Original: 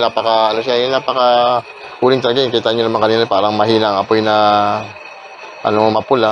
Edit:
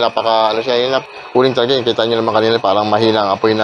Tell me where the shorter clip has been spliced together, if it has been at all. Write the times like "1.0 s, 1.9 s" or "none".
1.1 s